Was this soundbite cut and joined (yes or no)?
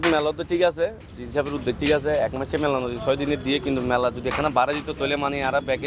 no